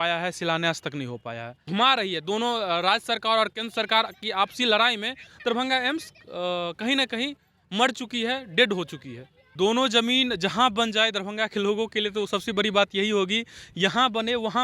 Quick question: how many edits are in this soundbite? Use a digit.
2